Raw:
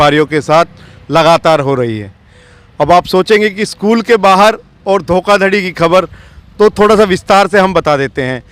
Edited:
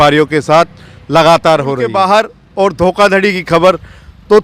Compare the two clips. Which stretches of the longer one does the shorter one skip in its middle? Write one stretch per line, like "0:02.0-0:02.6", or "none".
0:01.9-0:04.2